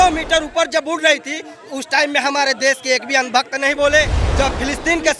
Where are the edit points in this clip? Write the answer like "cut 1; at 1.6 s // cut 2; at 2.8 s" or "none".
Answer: cut 1; at 4.2 s